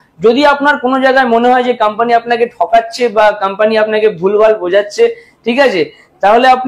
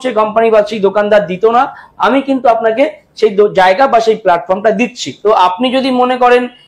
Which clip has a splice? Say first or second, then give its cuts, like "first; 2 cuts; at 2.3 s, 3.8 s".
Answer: second; 1 cut; at 5.1 s